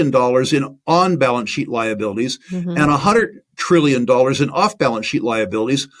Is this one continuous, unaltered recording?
yes; 0 cuts

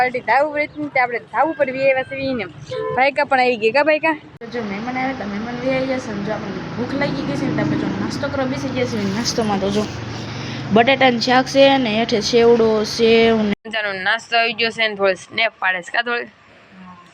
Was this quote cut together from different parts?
yes; 2 cuts; at 4.3 s, 13.5 s

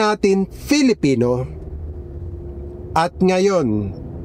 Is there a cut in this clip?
no; 0 cuts

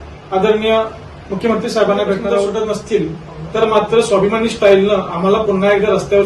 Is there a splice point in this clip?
yes; 1 cut; at 2.5 s

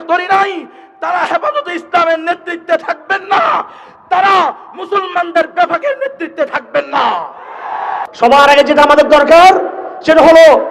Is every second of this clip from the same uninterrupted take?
no; 1 cut; at 8.0 s

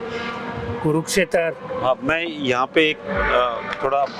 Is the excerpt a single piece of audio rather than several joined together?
yes; 0 cuts

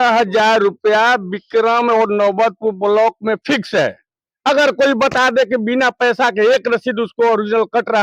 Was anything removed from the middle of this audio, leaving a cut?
no; 0 cuts

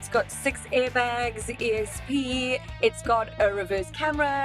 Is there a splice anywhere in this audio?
no; 0 cuts

